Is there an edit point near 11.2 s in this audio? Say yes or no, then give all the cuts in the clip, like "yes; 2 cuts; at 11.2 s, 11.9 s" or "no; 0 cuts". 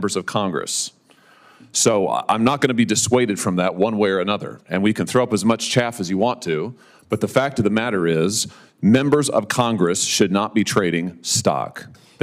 no; 0 cuts